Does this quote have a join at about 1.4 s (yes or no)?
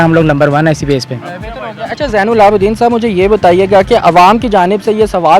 no